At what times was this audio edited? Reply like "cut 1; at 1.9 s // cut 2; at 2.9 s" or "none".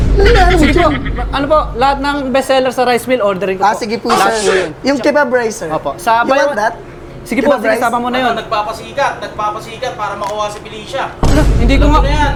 none